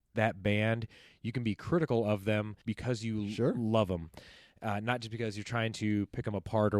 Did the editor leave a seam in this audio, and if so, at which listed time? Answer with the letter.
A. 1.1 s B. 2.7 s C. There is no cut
B